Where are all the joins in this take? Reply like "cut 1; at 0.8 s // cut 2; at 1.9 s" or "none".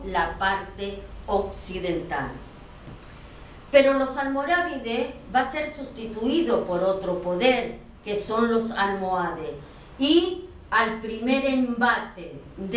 cut 1; at 6.9 s